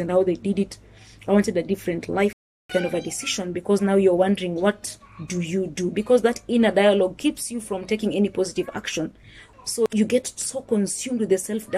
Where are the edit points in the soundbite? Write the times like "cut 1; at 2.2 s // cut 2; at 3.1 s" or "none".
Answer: cut 1; at 2.6 s // cut 2; at 9.5 s